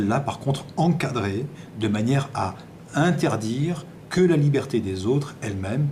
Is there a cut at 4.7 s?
yes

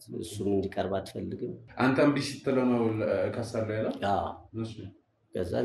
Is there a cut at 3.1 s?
no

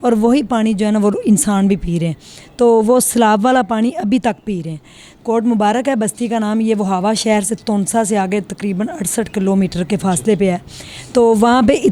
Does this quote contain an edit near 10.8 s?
no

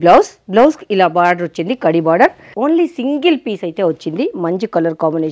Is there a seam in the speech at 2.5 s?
yes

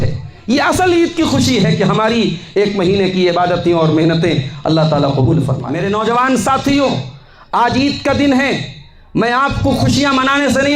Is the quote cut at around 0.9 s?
no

